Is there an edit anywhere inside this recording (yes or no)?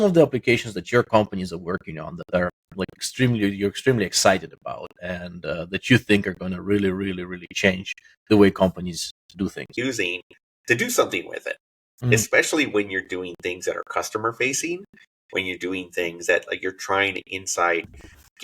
yes